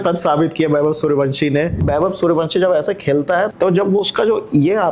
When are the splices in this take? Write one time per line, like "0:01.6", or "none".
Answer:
0:01.8
0:03.5